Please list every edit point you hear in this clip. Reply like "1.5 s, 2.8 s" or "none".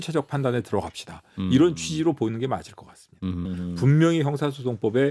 3.5 s